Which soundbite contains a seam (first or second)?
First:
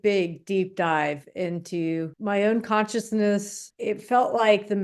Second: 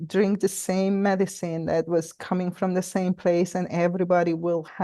first